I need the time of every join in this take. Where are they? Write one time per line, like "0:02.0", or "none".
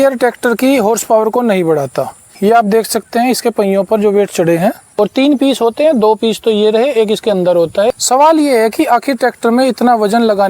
0:02.2
0:04.8
0:07.9

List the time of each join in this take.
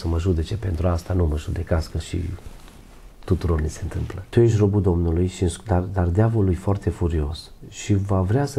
0:04.1

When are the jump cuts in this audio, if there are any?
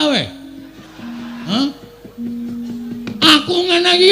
0:01.4

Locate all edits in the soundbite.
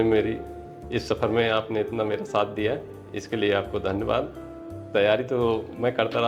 none

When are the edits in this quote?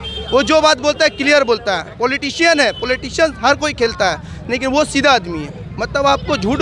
none

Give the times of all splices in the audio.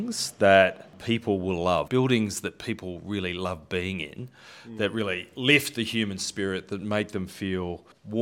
0:01.9

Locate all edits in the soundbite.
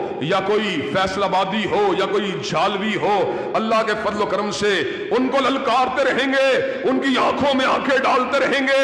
none

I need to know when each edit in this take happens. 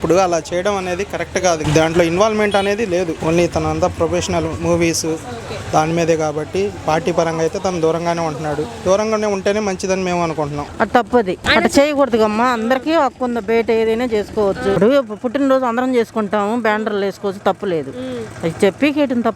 0:01.6
0:03.2
0:10.6
0:11.4
0:14.8

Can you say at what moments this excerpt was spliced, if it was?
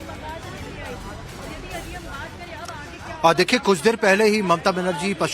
0:03.8

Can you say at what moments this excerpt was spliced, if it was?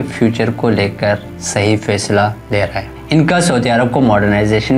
none

